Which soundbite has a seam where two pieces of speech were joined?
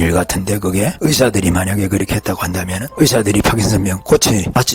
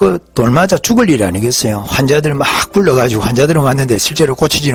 first; 2 cuts; at 0.9 s, 2.8 s

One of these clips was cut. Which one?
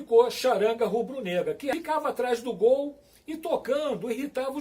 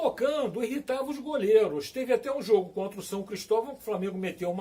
first; 1 cut; at 1.7 s

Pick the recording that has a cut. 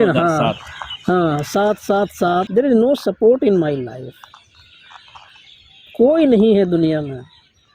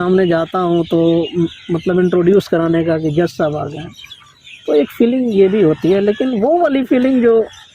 first; 1 cut; at 2.5 s

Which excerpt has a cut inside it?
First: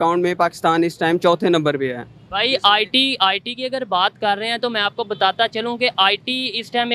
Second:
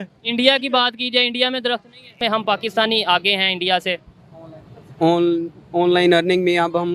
second; 1 cut; at 2.1 s

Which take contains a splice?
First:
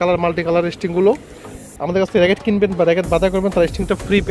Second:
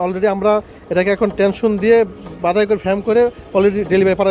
first; 1 cut; at 1.5 s

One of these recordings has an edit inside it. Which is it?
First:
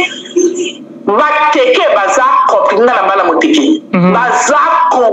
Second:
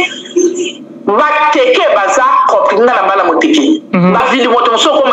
second; 1 cut; at 4.2 s

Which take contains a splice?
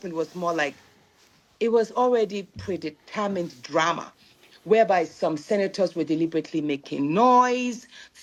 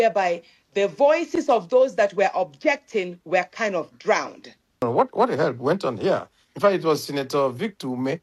second; 1 cut; at 4.8 s

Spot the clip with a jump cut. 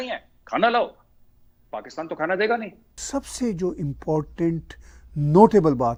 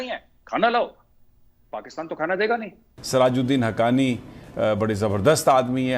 second; 1 cut; at 2.9 s

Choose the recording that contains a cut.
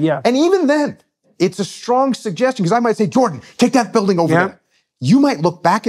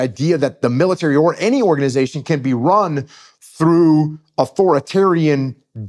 first; 1 cut; at 1.2 s

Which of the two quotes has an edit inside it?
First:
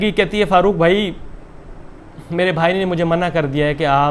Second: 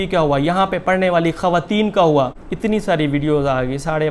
second; 1 cut; at 2.4 s

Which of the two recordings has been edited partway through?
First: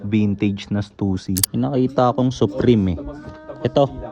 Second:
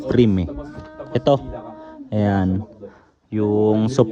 first; 1 cut; at 1.5 s

